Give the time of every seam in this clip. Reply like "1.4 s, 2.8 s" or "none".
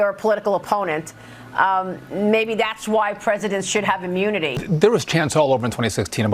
4.6 s